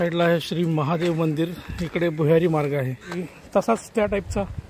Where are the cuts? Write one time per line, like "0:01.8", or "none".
0:03.3